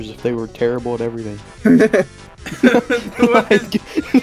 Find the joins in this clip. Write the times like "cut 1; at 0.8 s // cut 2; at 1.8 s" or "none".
none